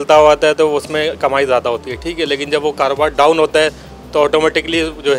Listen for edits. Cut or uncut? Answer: uncut